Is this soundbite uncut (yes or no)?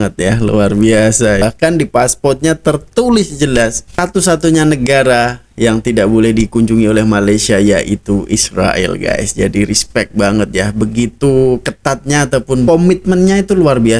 no